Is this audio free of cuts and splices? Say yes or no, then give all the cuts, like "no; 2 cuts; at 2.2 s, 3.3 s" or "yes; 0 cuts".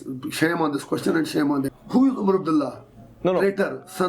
no; 1 cut; at 1.7 s